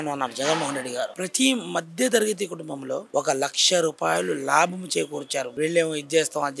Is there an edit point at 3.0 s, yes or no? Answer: no